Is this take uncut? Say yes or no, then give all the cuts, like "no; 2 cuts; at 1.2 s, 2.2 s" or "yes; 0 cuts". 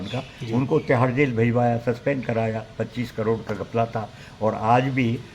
yes; 0 cuts